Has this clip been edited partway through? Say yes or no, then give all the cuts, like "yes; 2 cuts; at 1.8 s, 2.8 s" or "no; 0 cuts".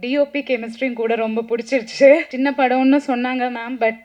yes; 1 cut; at 2.3 s